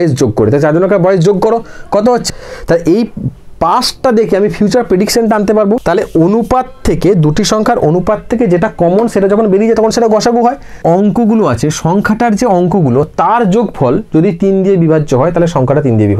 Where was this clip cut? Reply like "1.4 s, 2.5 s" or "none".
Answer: 2.2 s, 5.8 s, 10.8 s